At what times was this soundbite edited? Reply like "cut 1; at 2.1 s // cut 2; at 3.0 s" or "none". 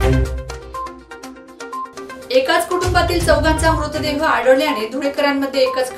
cut 1; at 1.9 s

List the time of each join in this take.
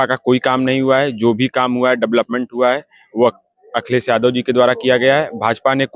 none

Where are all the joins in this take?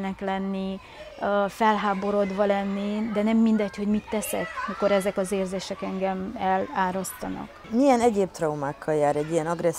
none

